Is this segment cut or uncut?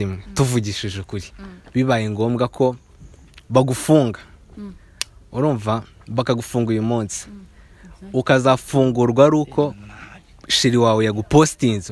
uncut